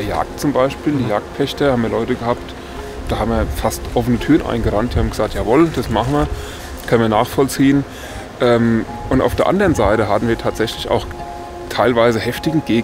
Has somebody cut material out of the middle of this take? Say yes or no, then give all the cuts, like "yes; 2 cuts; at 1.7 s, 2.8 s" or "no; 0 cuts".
no; 0 cuts